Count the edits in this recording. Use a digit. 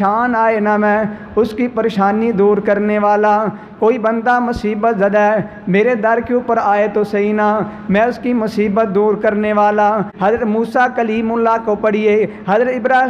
1